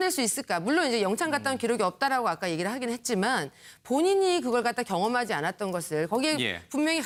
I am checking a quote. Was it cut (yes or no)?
no